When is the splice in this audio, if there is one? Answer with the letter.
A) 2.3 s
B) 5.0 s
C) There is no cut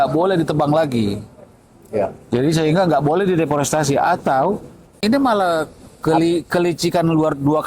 B